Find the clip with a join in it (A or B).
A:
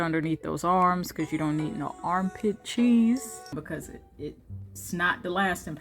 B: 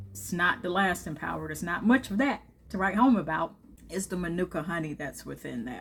A